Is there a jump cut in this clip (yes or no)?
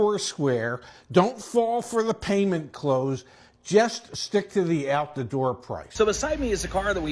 yes